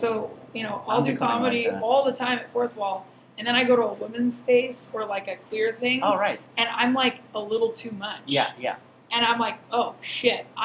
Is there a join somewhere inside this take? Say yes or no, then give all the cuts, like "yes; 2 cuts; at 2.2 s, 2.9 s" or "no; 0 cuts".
no; 0 cuts